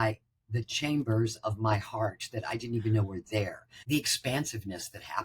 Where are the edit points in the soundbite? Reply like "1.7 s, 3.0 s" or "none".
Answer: 3.7 s